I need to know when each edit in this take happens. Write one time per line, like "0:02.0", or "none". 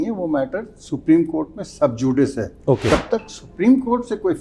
0:02.9